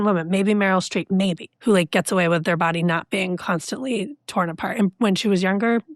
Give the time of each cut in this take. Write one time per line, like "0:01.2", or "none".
0:01.5